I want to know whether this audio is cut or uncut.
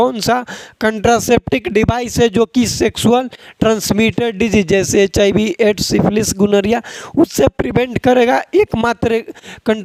uncut